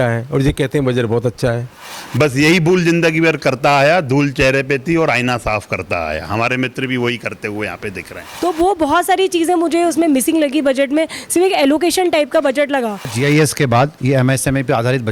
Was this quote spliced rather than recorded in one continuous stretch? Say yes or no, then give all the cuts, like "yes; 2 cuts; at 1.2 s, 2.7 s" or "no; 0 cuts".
yes; 3 cuts; at 1.9 s, 8.2 s, 13.1 s